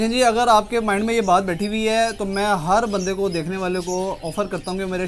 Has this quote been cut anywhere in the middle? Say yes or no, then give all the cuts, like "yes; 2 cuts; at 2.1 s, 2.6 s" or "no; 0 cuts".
no; 0 cuts